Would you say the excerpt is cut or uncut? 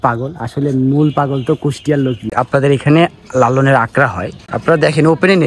cut